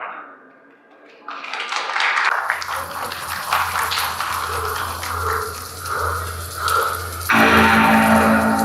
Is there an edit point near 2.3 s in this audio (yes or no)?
yes